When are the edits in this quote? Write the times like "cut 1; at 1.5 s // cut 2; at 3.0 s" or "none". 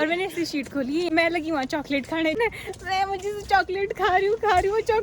cut 1; at 1.1 s // cut 2; at 2.4 s